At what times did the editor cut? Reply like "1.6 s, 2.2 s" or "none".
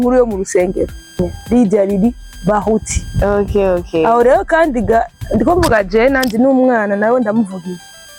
1.2 s